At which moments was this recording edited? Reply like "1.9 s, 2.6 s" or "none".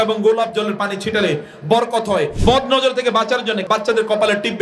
2.3 s, 3.6 s